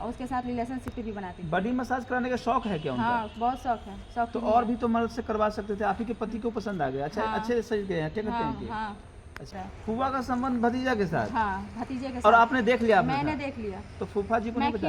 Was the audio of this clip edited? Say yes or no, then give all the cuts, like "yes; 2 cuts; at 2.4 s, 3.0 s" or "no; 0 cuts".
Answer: yes; 1 cut; at 9.5 s